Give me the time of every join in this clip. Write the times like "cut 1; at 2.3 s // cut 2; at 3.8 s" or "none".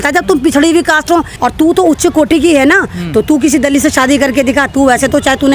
cut 1; at 1.3 s